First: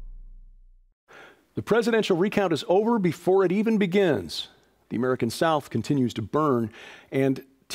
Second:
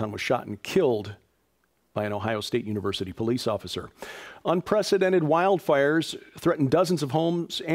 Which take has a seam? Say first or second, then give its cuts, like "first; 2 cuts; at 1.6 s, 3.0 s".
second; 1 cut; at 5.9 s